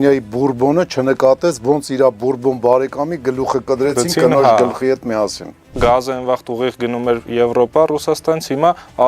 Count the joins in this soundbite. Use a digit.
1